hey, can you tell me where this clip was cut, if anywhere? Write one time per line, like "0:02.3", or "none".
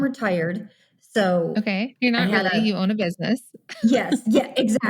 0:01.9